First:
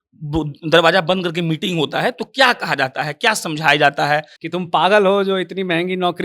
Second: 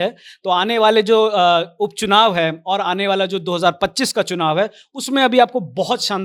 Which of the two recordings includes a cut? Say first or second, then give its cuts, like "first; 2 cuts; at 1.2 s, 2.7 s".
first; 1 cut; at 4.3 s